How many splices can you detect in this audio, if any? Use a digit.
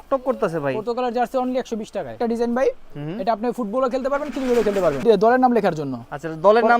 2